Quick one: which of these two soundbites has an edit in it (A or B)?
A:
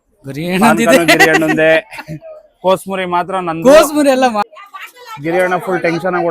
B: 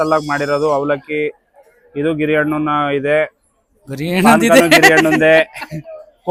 A